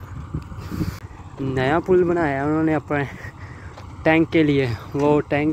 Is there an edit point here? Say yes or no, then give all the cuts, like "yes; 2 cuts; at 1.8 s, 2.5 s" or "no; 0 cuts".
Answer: yes; 1 cut; at 1.0 s